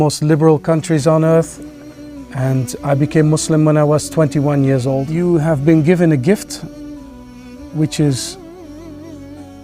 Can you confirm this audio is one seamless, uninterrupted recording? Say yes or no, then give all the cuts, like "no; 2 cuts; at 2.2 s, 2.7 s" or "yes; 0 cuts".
no; 1 cut; at 5.1 s